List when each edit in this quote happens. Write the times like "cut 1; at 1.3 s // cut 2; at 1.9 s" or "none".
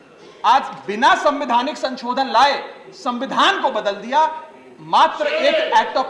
none